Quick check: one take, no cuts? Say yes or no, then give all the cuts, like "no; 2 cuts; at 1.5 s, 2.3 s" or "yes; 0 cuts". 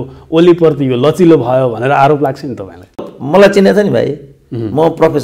no; 1 cut; at 3.0 s